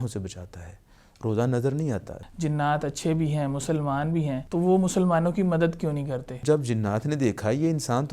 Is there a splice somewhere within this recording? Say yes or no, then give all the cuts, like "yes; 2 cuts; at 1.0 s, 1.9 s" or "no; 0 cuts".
yes; 3 cuts; at 2.1 s, 4.4 s, 6.3 s